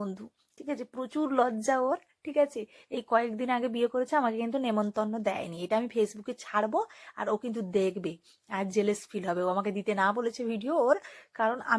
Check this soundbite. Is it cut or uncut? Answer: uncut